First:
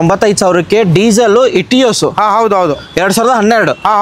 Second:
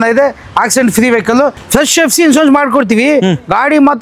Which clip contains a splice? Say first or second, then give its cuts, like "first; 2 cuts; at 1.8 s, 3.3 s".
second; 1 cut; at 1.6 s